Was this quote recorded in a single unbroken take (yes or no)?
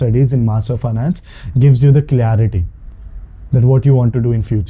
yes